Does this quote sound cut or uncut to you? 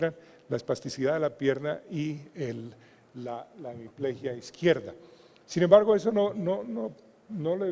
cut